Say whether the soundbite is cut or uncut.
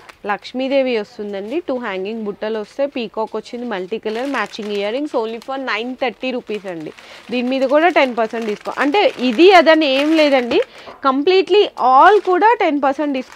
uncut